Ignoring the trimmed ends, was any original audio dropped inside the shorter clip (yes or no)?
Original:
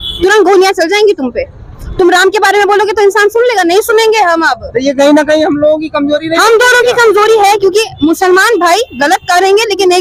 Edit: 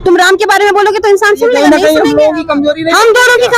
yes